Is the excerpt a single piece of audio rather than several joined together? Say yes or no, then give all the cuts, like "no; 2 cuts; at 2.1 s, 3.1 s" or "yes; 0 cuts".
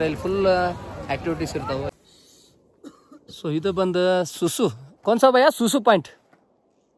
no; 1 cut; at 1.9 s